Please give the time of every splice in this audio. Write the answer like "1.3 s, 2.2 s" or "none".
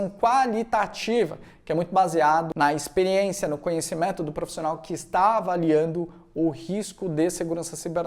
2.5 s